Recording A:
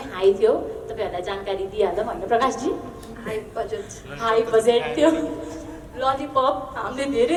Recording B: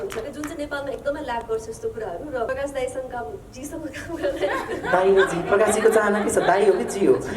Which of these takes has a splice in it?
B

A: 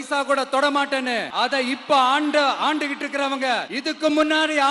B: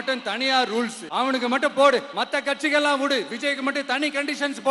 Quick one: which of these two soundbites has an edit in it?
B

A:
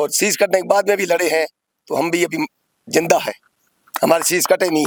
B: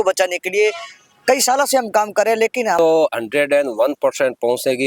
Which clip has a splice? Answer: B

